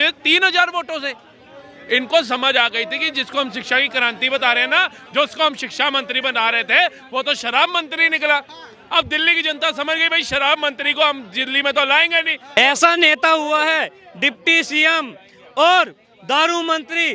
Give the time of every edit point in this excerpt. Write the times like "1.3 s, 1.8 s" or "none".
12.6 s